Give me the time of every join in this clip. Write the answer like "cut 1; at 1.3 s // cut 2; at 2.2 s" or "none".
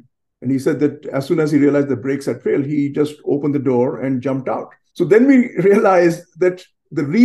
cut 1; at 4.8 s